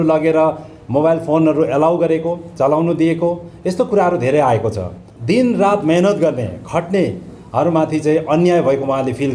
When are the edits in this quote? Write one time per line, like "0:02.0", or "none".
0:05.1